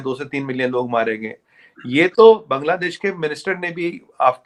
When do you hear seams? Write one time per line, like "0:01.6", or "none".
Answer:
none